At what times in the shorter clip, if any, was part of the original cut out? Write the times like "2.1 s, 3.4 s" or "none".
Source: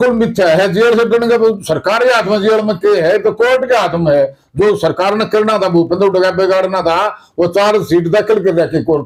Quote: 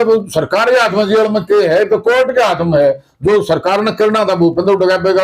none